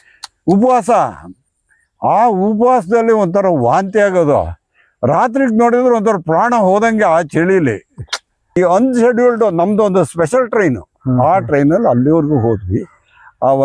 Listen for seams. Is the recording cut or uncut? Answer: cut